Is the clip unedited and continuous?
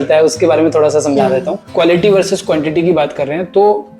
no; 1 cut; at 1.6 s

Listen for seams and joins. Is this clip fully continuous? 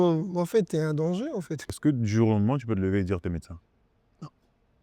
no; 1 cut; at 1.6 s

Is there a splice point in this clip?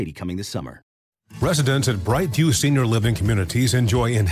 yes; 1 cut; at 1.0 s

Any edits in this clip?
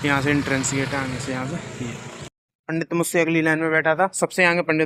no; 0 cuts

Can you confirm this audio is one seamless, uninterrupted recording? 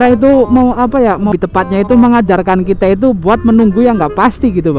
no; 1 cut; at 1.3 s

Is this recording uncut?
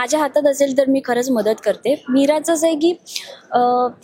yes; 0 cuts

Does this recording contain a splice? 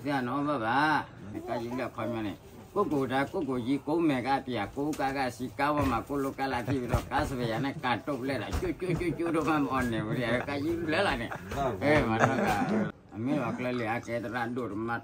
yes; 2 cuts; at 1.3 s, 13.0 s

